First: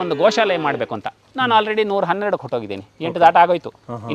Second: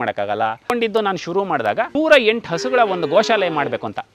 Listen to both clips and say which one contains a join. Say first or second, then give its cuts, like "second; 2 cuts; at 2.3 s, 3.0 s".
second; 2 cuts; at 0.7 s, 2.0 s